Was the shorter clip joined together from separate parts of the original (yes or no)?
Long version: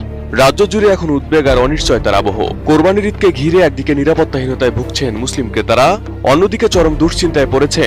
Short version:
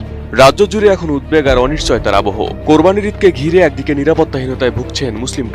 no